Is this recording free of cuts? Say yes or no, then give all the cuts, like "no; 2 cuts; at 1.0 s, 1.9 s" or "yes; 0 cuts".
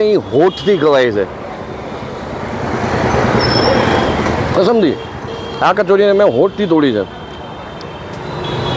yes; 0 cuts